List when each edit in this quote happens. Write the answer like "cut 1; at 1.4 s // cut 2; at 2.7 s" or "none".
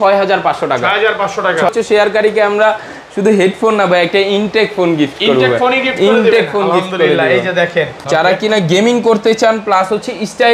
cut 1; at 1.7 s // cut 2; at 8.0 s